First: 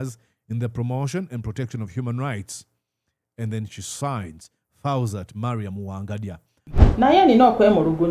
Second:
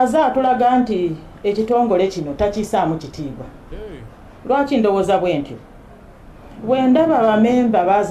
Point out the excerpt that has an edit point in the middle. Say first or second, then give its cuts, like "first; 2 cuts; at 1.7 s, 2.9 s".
first; 1 cut; at 6.8 s